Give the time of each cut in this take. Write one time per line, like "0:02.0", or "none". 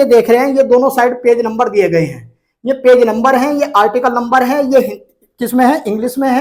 none

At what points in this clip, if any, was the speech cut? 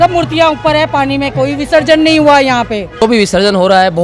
0:03.0

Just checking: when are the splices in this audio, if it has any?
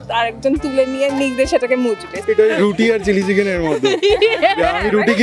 0:02.2

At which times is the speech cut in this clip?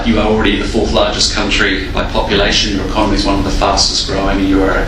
none

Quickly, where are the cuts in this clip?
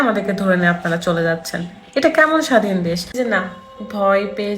0:03.1

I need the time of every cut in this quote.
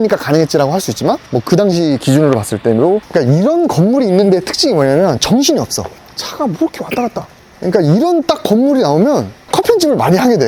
0:03.0

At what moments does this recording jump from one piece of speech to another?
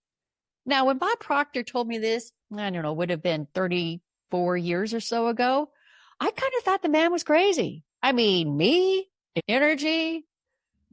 0:09.2

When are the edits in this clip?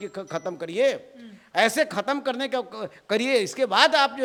none

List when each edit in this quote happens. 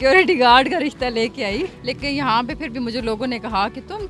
0:01.8

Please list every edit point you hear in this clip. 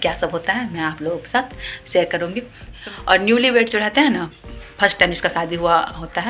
0:02.7

